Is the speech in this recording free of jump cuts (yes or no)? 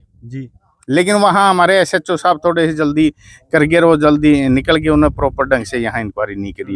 yes